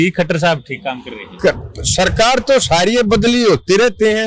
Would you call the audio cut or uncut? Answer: uncut